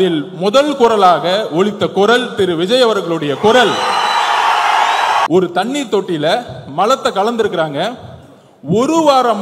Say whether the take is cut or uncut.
cut